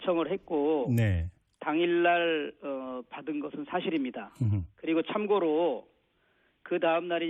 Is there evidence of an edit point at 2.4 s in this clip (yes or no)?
no